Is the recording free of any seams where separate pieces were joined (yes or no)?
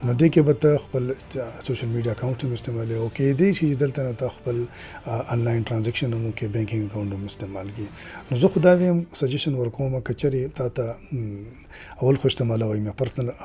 yes